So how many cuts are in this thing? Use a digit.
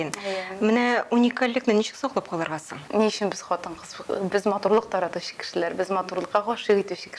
1